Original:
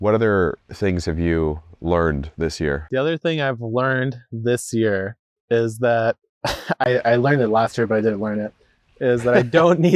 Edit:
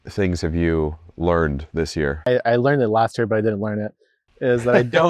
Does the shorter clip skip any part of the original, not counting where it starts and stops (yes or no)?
yes